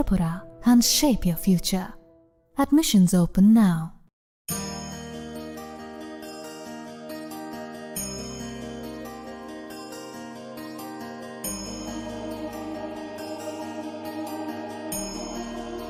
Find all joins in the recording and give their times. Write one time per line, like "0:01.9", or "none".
none